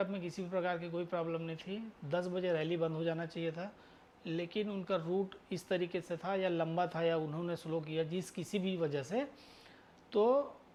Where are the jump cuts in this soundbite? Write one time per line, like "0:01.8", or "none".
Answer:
none